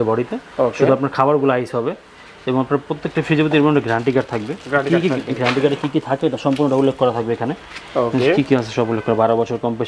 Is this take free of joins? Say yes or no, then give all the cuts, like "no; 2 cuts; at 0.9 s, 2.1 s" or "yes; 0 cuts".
yes; 0 cuts